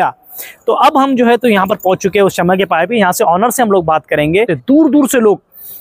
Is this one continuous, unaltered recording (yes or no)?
no